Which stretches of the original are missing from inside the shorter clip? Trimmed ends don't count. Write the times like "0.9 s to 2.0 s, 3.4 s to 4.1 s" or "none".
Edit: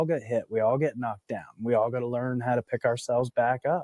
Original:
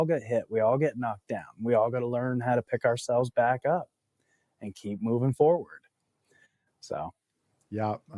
none